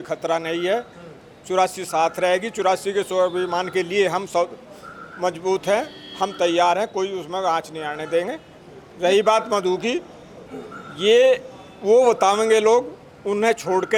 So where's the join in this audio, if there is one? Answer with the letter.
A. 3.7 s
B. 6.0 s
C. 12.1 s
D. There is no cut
D